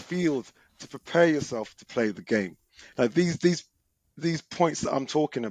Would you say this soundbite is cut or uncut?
uncut